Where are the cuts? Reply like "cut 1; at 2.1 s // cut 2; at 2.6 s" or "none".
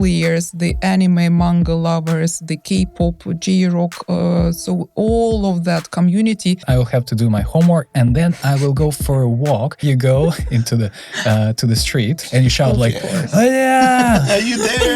cut 1; at 6.6 s // cut 2; at 9.8 s // cut 3; at 12.2 s